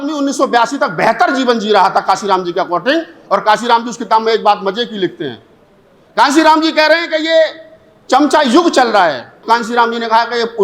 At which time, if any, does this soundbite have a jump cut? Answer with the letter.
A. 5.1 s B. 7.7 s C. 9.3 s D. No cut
C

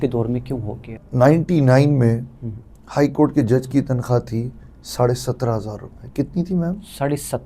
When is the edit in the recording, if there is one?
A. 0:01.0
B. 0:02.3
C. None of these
A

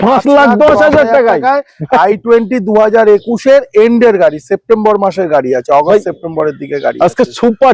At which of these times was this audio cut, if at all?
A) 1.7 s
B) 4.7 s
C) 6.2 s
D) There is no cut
D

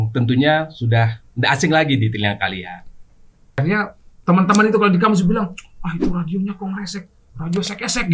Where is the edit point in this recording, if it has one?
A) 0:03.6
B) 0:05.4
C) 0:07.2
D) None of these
A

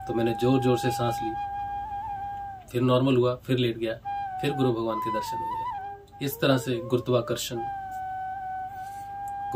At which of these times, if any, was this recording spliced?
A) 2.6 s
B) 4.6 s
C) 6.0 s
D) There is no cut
C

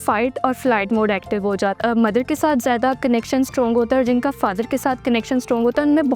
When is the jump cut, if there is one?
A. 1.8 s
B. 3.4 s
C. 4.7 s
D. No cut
A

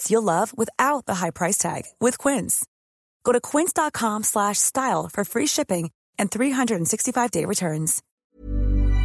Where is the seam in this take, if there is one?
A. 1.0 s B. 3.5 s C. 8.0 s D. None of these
C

